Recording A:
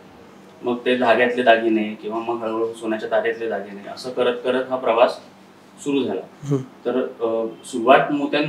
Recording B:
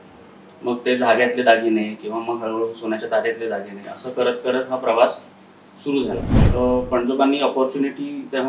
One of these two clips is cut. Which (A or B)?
B